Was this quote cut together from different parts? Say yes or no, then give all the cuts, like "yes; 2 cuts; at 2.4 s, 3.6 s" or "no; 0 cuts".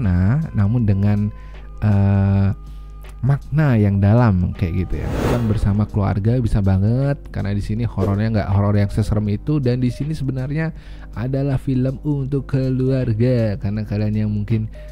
yes; 1 cut; at 5.2 s